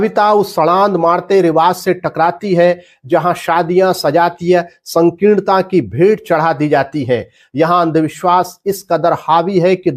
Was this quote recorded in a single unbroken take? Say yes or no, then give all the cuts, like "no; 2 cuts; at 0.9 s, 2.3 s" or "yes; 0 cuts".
yes; 0 cuts